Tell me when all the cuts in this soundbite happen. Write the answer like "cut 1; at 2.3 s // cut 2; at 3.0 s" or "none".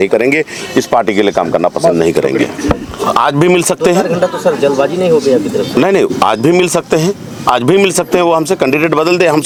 none